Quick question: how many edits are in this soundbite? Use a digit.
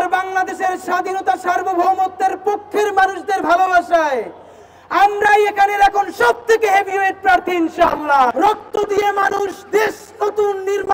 1